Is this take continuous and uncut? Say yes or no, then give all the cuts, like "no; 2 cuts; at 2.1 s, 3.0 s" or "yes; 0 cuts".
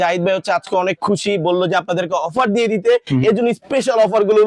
yes; 0 cuts